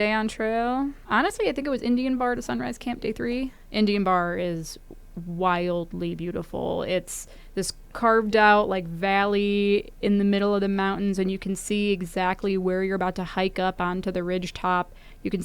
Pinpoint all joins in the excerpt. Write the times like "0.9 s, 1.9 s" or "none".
1.0 s, 3.6 s